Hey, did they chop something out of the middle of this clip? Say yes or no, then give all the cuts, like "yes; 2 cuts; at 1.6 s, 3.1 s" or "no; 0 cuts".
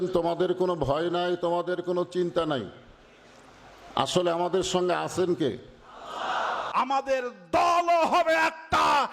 yes; 1 cut; at 6.6 s